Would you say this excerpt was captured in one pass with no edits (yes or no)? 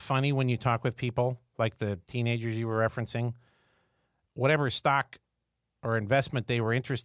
yes